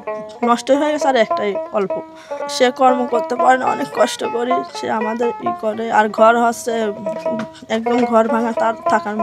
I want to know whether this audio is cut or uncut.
cut